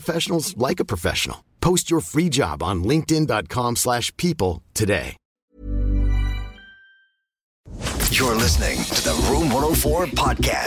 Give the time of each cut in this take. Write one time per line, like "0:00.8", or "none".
0:07.7